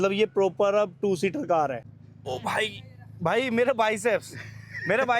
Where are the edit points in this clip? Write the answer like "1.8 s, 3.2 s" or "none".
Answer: 1.9 s